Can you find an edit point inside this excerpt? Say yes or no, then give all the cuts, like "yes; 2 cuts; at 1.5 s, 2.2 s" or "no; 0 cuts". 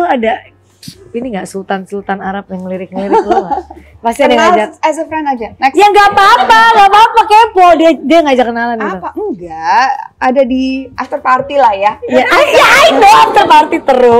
yes; 2 cuts; at 3.9 s, 10.9 s